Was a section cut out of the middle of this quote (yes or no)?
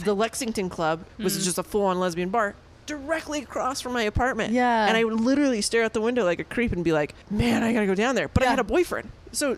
yes